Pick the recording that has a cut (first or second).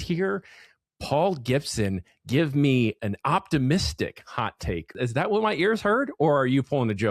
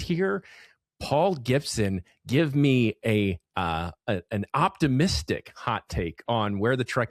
first